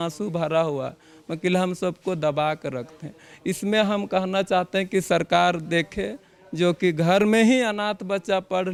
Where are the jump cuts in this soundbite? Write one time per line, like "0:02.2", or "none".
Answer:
none